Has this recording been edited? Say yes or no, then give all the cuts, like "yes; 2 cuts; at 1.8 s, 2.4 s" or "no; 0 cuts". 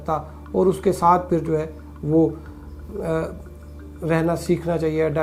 no; 0 cuts